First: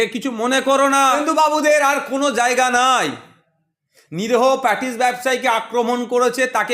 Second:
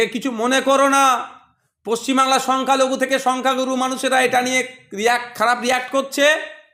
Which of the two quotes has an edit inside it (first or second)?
first